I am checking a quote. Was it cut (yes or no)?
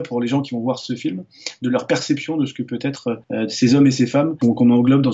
yes